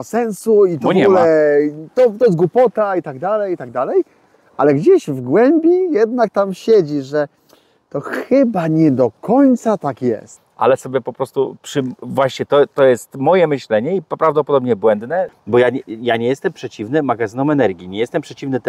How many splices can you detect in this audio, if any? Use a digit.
2